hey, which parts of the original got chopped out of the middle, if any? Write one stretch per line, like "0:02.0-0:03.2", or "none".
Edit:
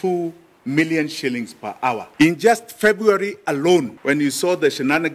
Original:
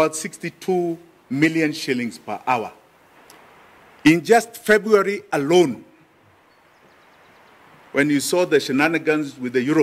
0:02.7-0:03.9
0:05.8-0:07.8